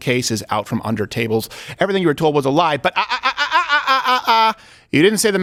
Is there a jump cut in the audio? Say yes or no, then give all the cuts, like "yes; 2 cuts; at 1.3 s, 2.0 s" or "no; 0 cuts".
no; 0 cuts